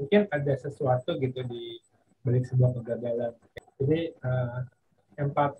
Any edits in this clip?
yes; 1 cut; at 3.5 s

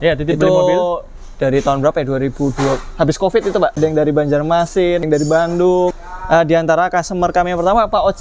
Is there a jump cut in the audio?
yes; 3 cuts; at 3.8 s, 5.1 s, 6.0 s

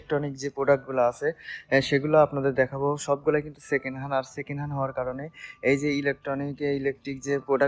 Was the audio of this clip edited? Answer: no; 0 cuts

